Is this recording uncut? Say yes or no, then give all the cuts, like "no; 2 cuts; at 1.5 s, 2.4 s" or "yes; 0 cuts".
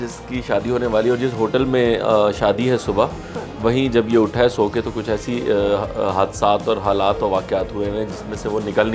yes; 0 cuts